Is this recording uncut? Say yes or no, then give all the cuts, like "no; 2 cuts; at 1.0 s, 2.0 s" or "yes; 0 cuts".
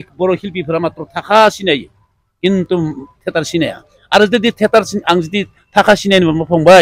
yes; 0 cuts